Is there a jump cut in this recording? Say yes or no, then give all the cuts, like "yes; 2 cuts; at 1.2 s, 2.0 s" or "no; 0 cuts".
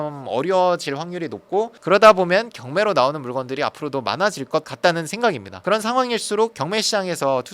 yes; 1 cut; at 6.5 s